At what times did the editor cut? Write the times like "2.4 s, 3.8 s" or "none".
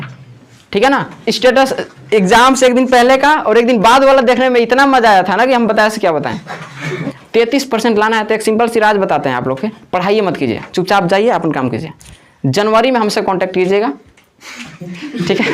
1.1 s, 7.1 s